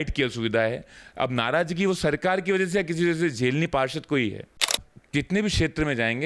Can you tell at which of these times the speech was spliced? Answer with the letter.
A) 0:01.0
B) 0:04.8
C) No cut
B